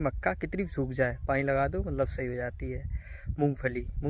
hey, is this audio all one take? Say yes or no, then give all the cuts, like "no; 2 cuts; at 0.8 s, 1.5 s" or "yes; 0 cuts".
yes; 0 cuts